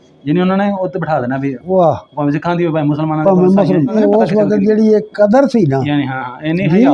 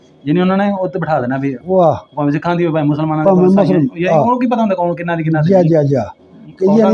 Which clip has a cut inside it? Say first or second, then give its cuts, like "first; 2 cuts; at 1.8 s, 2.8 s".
first; 1 cut; at 3.9 s